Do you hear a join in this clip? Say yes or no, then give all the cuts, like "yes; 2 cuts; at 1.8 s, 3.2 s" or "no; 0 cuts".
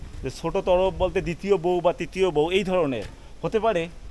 no; 0 cuts